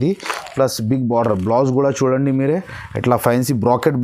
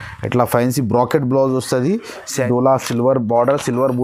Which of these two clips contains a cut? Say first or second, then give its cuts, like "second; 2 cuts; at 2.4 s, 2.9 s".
second; 1 cut; at 2.3 s